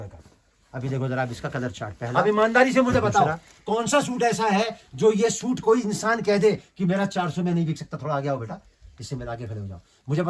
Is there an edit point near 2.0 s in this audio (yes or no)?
yes